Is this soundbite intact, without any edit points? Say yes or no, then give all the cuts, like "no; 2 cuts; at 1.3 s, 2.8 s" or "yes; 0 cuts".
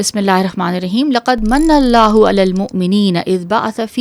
yes; 0 cuts